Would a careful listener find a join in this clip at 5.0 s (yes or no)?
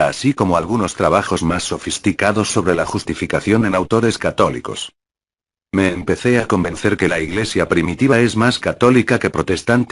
no